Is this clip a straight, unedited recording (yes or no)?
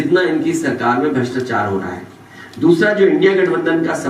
yes